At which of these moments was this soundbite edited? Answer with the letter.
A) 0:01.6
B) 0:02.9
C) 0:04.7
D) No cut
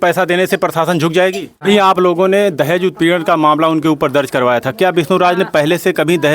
A